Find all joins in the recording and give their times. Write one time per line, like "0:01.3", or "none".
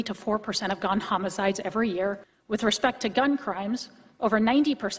0:02.3

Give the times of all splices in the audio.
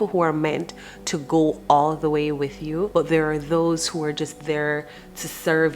0:02.9

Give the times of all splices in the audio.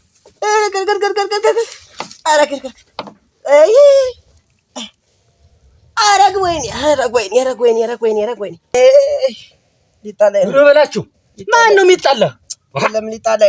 0:08.7

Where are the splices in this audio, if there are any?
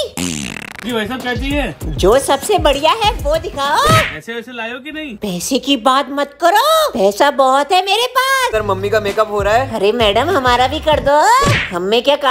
0:00.8
0:08.5

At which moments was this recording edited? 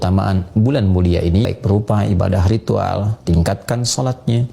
0:01.5

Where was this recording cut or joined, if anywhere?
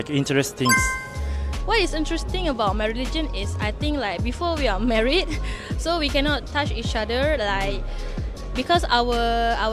none

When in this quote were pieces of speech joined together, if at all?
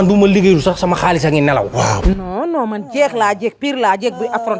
0:02.0

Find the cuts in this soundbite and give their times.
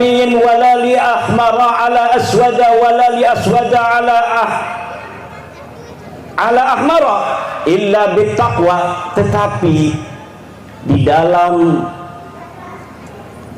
none

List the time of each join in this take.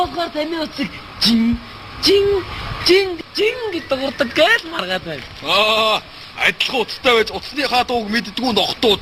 0:02.7

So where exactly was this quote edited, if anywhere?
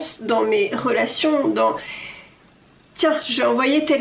none

